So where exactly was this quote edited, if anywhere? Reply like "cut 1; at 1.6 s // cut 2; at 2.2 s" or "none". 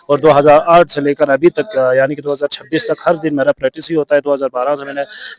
none